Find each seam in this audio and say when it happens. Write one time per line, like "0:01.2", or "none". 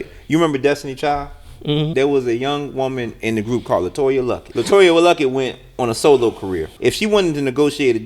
0:01.9
0:04.4
0:06.7